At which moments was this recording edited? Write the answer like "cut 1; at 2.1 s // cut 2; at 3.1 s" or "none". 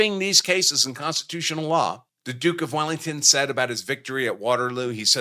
cut 1; at 2.1 s